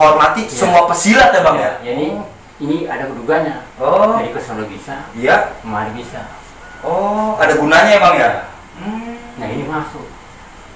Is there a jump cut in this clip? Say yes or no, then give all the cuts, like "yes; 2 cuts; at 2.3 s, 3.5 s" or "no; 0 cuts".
no; 0 cuts